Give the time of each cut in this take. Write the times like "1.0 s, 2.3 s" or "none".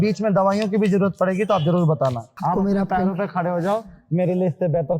2.3 s